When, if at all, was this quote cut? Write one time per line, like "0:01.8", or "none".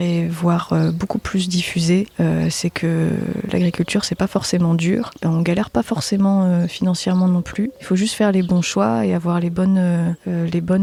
none

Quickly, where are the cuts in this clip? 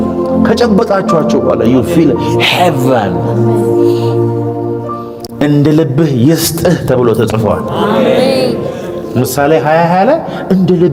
none

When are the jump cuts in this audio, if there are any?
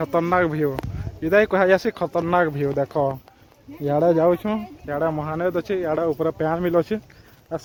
none

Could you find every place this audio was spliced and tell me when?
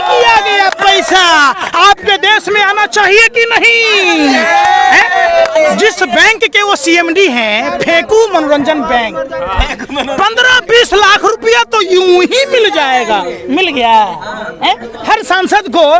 none

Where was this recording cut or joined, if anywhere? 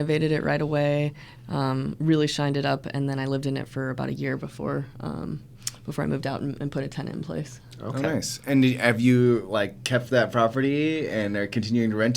none

